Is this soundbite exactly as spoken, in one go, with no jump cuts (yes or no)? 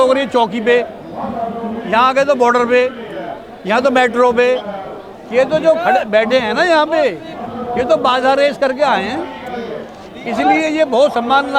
yes